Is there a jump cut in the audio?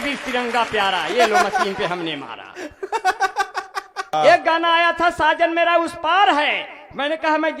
yes; 1 cut; at 4.1 s

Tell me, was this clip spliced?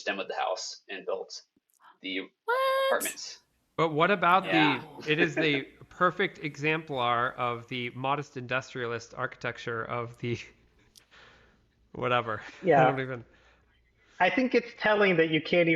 yes; 1 cut; at 13.5 s

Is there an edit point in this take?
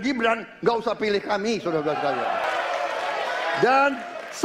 yes; 1 cut; at 2.4 s

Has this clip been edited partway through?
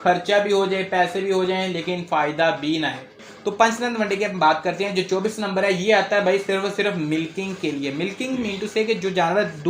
yes; 1 cut; at 3.2 s

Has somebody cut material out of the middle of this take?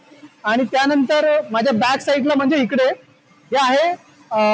no; 0 cuts

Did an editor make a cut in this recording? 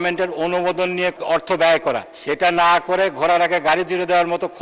yes; 2 cuts; at 1.2 s, 2.1 s

